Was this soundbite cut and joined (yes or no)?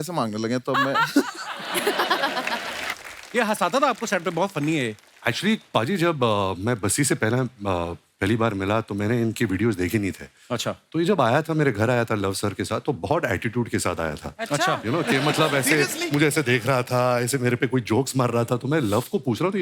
yes